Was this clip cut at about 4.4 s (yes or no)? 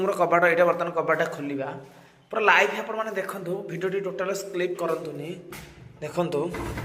no